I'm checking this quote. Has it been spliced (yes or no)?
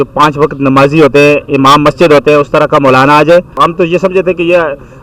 yes